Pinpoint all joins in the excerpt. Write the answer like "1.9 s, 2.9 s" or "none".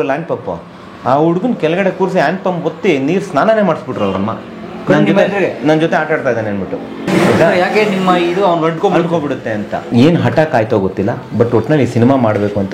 7.1 s, 9.9 s